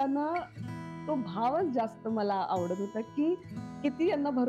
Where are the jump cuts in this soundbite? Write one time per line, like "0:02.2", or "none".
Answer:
none